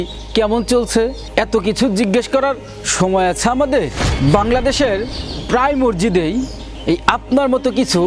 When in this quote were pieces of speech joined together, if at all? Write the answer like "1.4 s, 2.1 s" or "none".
4.0 s